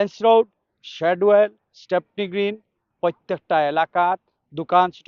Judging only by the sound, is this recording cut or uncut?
uncut